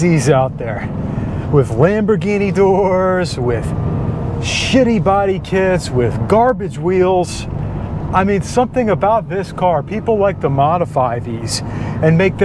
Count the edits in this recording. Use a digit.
0